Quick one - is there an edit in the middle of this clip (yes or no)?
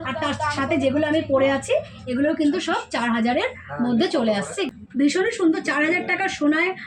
yes